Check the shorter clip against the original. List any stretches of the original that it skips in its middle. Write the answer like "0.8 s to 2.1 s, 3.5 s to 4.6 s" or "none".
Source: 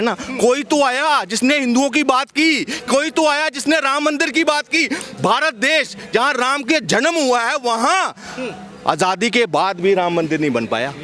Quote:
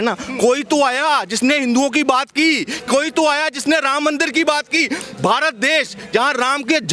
none